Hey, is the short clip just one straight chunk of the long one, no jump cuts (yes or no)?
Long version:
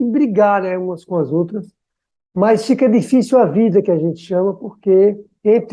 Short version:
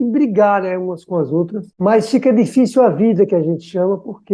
no